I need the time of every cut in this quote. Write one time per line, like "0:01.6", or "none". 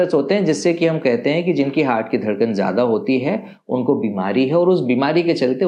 none